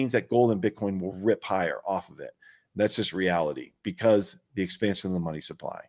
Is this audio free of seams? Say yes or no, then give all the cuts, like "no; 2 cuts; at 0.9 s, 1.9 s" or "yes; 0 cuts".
yes; 0 cuts